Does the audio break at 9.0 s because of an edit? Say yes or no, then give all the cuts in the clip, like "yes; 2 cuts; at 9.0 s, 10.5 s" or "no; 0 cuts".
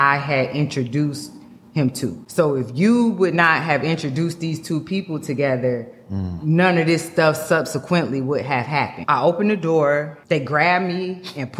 yes; 3 cuts; at 2.2 s, 9.0 s, 10.1 s